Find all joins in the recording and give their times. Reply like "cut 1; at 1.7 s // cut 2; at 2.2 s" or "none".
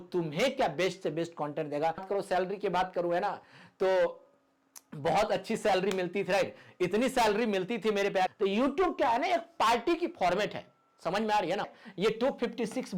cut 1; at 2.0 s // cut 2; at 8.3 s // cut 3; at 11.8 s